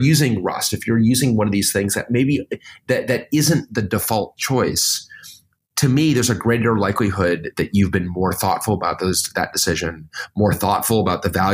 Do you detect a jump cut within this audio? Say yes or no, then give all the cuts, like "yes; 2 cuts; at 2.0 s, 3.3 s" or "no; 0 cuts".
no; 0 cuts